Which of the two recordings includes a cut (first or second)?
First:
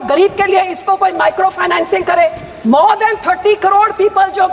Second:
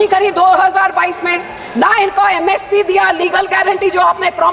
first